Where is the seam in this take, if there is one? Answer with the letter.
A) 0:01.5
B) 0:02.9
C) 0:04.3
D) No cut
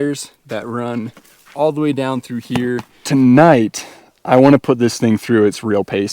B